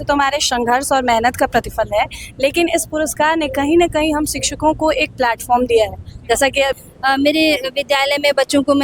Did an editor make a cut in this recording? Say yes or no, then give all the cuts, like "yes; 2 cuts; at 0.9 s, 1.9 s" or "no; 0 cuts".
yes; 1 cut; at 6.9 s